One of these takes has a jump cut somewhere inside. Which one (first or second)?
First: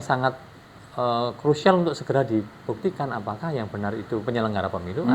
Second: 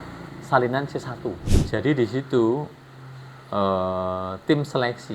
second